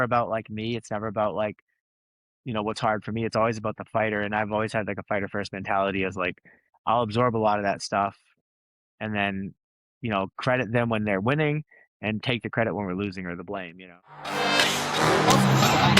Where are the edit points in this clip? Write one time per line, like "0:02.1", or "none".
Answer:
0:14.3